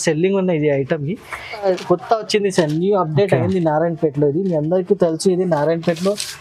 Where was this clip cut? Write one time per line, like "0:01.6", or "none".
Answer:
0:01.5